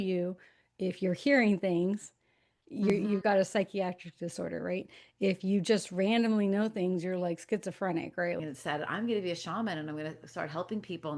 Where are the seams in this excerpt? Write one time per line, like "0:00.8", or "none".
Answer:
0:08.4